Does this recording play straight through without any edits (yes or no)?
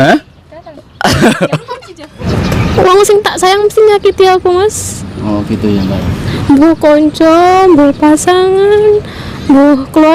no